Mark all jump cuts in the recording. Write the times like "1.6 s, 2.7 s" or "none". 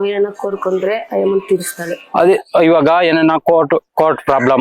2.1 s

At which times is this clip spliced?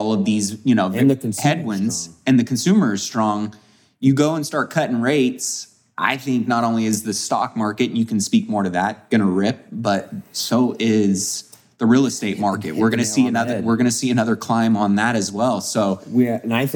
none

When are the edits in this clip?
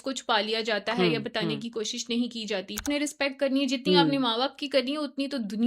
2.8 s

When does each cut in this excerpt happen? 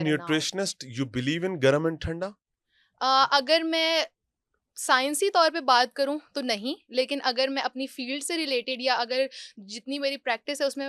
none

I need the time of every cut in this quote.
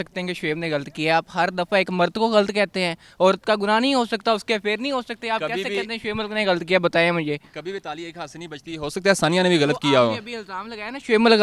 none

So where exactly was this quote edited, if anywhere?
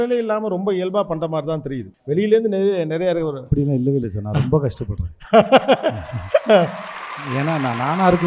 none

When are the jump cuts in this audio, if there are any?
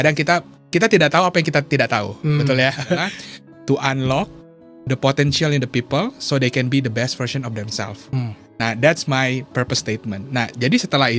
3.2 s

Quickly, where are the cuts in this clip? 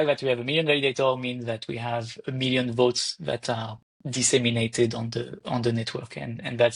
none

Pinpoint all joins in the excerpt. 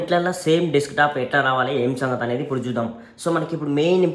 none

